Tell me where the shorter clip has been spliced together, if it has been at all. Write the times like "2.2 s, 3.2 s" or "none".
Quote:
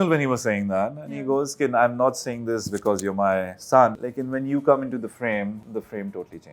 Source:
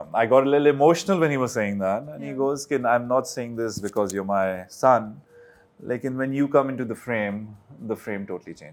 4.1 s, 5.6 s